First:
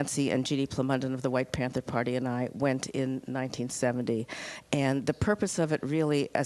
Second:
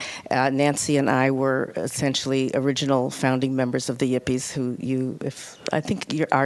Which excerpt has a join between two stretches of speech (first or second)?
second